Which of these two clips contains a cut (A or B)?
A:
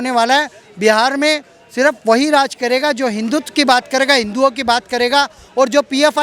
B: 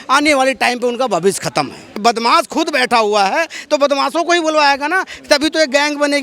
B